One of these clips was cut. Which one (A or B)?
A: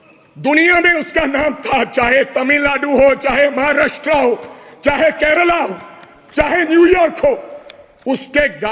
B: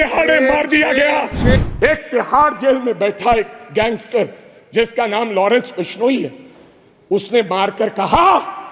B